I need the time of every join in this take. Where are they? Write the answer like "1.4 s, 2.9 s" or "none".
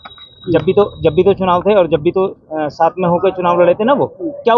none